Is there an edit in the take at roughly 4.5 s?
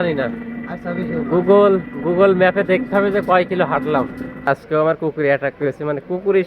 yes; 1 cut; at 4.5 s

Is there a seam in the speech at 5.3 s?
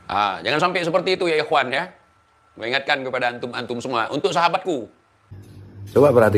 yes; 1 cut; at 5.3 s

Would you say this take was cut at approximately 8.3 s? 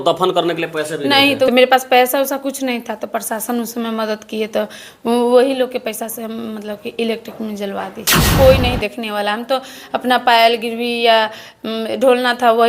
yes; 2 cuts; at 1.5 s, 8.3 s

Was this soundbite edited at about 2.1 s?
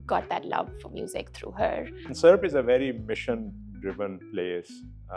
yes; 1 cut; at 2.1 s

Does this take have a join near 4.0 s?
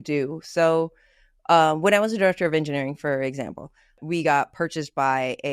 yes; 1 cut; at 4.0 s

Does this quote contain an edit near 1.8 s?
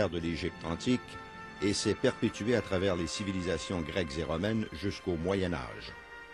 yes; 1 cut; at 1.8 s

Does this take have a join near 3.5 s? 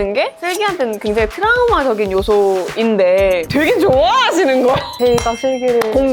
yes; 2 cuts; at 3.5 s, 4.9 s

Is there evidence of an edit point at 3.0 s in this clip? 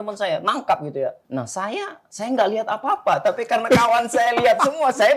no; 1 cut; at 1.2 s

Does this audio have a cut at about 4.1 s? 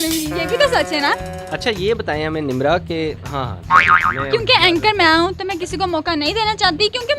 no; 1 cut; at 1.4 s

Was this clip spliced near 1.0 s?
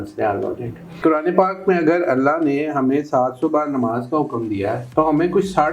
yes; 1 cut; at 1.0 s

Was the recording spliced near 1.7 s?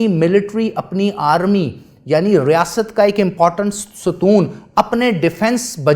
no; 0 cuts

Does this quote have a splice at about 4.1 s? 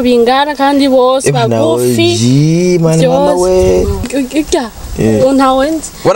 yes; 1 cut; at 4.1 s

